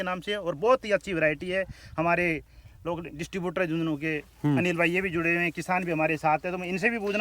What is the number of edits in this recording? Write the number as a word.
zero